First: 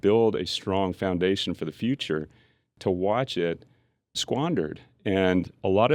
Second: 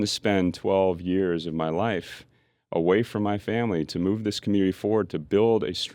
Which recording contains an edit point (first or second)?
first